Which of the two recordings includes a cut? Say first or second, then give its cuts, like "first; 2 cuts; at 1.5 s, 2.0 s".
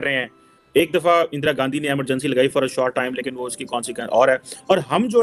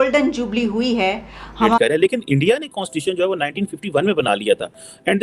second; 1 cut; at 1.8 s